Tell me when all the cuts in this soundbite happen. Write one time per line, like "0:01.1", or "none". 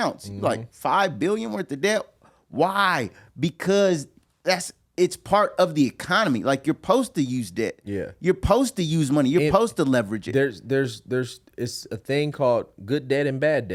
none